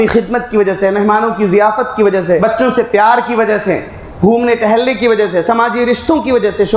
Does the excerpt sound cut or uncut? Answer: cut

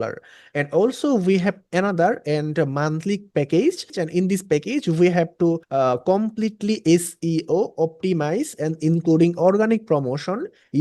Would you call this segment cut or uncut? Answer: cut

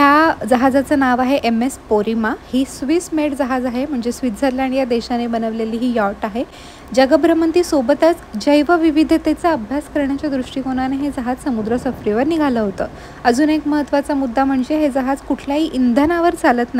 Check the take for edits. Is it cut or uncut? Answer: uncut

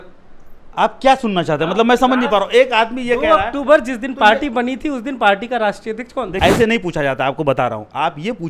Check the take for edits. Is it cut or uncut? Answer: cut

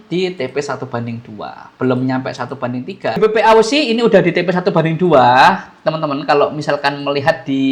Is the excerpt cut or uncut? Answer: cut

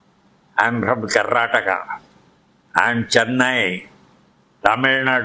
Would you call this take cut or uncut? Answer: uncut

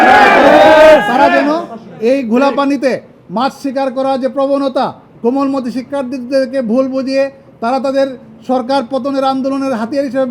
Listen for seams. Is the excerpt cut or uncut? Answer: cut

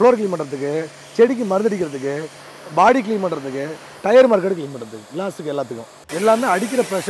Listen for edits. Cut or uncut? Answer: cut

